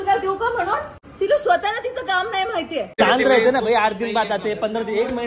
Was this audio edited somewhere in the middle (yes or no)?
yes